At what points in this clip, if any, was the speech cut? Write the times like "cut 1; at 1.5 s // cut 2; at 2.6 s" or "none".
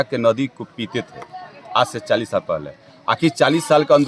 none